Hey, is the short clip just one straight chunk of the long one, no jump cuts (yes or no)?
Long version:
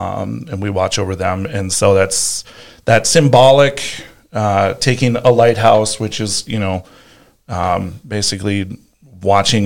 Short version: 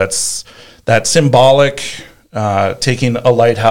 yes